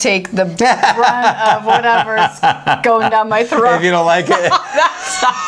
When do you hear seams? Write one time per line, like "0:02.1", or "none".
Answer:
none